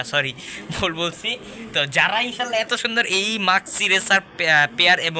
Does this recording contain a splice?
no; 0 cuts

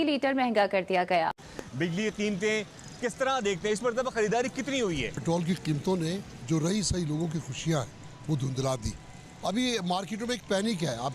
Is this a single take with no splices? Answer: no; 2 cuts; at 1.4 s, 5.2 s

